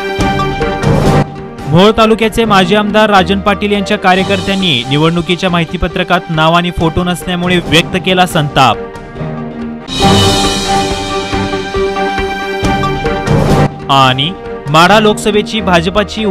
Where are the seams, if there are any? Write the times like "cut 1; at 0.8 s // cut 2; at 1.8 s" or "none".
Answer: none